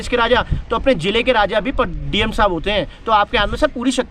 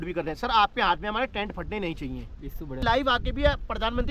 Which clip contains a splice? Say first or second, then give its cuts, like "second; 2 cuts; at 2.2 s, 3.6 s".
second; 1 cut; at 2.8 s